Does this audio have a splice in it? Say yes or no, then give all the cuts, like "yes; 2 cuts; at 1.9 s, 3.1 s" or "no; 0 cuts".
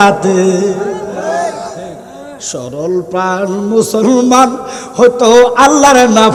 no; 0 cuts